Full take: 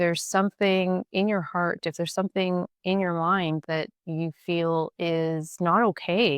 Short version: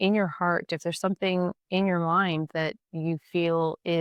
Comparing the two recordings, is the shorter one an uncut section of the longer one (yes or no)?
yes